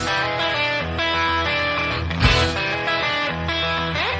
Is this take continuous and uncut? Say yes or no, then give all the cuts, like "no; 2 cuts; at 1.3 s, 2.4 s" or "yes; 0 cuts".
yes; 0 cuts